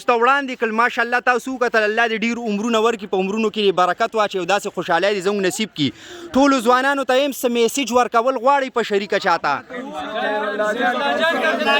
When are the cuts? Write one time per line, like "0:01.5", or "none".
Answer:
none